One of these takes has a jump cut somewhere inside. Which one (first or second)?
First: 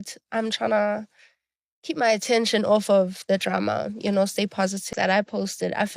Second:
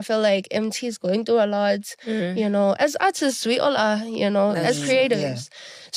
first